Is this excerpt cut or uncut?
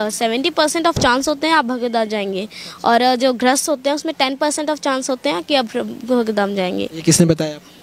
uncut